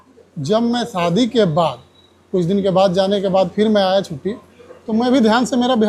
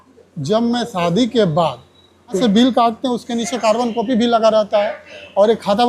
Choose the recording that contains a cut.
second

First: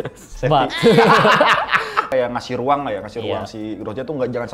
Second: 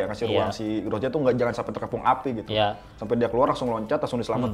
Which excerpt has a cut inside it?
first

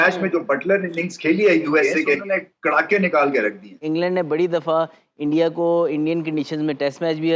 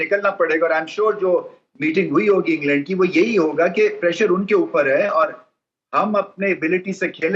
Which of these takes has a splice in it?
first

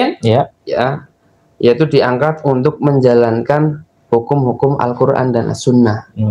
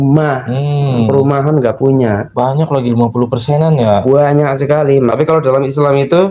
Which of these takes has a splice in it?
second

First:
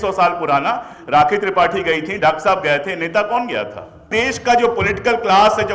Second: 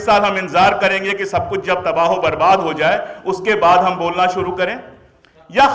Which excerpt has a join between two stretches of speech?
first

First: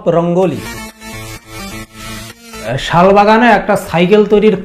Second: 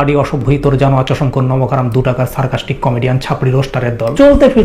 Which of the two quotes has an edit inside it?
first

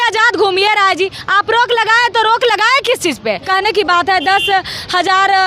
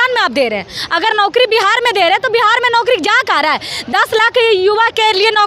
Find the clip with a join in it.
first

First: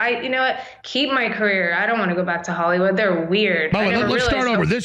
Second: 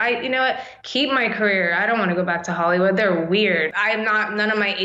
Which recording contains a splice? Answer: second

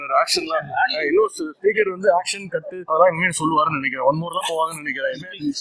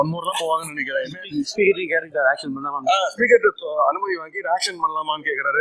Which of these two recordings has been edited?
first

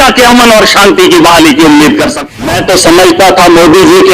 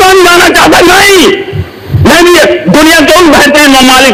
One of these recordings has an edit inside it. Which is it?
first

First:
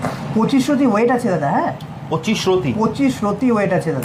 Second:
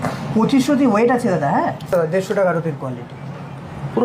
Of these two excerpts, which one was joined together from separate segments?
second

